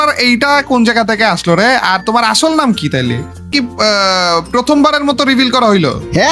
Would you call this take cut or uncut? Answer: cut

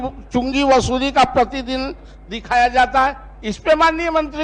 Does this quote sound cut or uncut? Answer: uncut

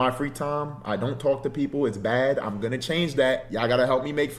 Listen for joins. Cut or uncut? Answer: cut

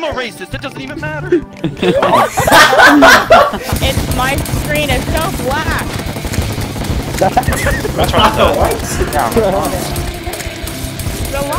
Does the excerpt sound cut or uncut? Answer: cut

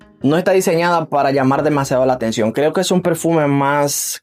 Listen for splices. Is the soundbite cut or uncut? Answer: uncut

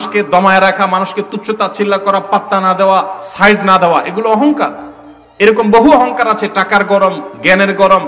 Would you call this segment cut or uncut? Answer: uncut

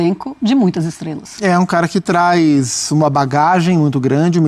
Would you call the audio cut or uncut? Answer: uncut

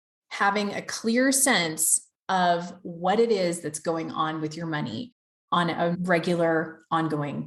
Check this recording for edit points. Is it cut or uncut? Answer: cut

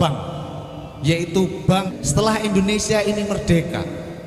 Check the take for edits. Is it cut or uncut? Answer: cut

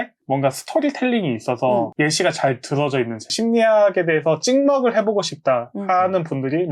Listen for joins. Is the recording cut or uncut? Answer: cut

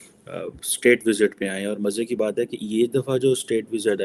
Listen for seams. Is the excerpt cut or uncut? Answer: uncut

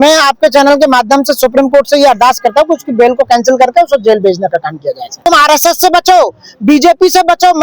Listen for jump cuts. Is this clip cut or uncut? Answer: cut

